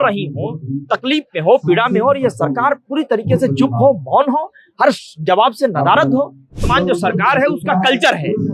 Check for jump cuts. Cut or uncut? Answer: cut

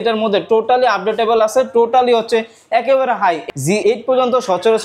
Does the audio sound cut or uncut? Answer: cut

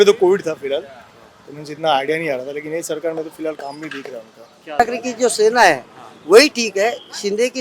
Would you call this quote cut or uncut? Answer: cut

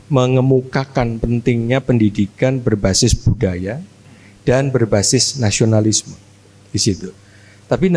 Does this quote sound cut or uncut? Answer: uncut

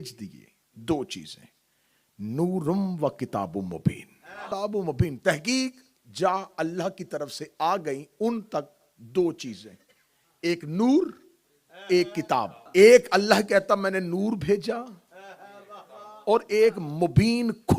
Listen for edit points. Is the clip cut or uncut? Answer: cut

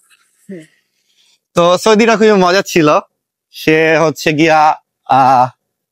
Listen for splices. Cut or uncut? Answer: uncut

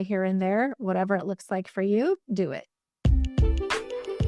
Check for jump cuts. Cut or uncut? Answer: cut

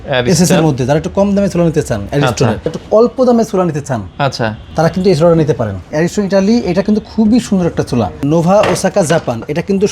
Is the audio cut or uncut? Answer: cut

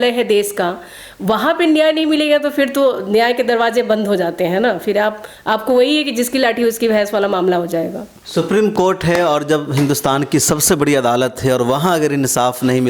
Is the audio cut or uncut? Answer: uncut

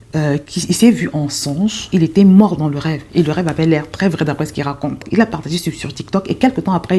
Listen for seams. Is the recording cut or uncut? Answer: cut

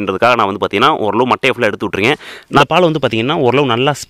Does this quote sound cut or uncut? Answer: cut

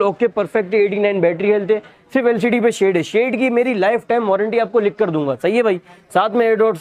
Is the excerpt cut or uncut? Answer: uncut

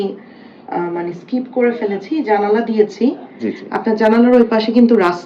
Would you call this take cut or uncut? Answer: uncut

